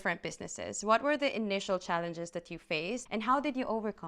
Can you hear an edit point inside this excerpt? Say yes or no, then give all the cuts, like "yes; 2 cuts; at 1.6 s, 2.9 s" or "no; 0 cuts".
yes; 1 cut; at 3.0 s